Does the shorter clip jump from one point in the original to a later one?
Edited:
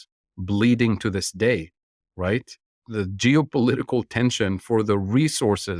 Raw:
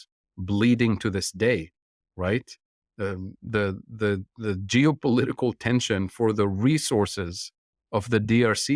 yes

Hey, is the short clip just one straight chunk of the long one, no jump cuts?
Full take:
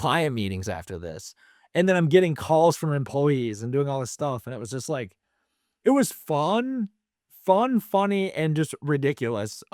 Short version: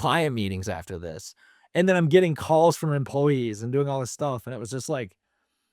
yes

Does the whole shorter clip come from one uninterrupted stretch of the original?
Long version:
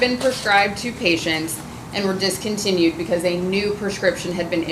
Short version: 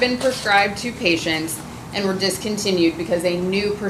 yes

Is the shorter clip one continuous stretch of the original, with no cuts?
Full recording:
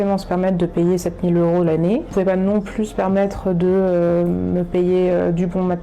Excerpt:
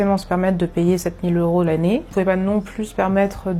yes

